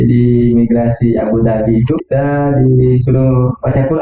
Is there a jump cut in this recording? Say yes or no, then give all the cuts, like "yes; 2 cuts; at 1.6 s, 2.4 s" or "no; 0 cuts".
yes; 1 cut; at 2.0 s